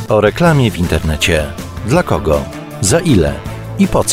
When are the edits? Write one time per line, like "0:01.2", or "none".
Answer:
none